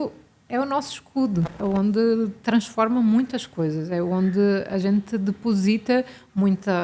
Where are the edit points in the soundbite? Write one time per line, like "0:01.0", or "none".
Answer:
0:01.6